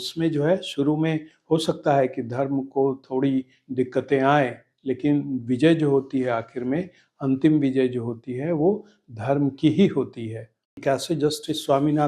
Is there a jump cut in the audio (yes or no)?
yes